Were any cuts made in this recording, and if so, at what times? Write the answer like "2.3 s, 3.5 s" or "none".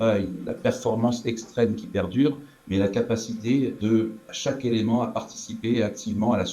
4.0 s

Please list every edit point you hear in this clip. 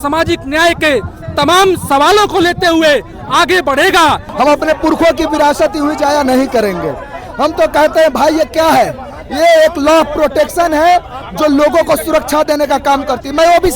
4.3 s

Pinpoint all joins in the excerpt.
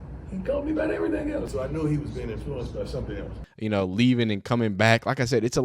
1.5 s, 3.4 s

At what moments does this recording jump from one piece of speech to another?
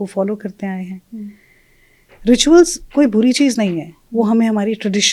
none

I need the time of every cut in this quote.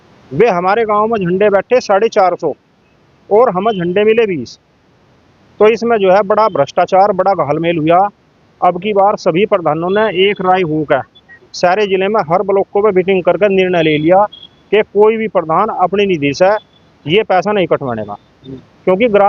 none

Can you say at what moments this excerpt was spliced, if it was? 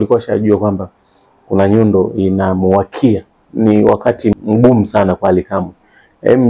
3.4 s, 4.3 s

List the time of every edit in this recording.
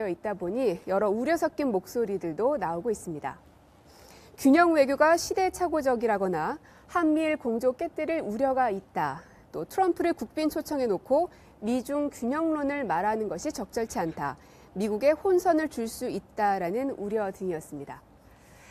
12.5 s

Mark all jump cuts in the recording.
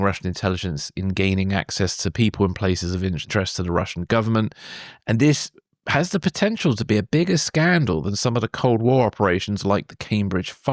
3.3 s

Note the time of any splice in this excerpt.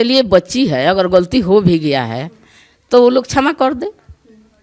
none

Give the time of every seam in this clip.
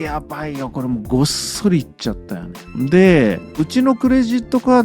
none

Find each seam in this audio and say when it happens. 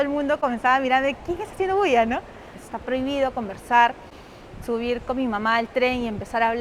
2.7 s

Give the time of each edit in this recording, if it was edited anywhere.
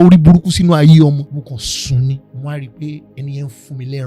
1.2 s, 2.3 s, 3.1 s

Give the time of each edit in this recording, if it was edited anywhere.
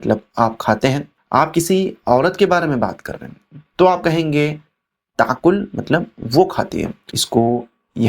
1.1 s, 7.2 s

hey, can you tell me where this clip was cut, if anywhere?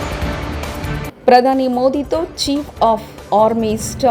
1.0 s

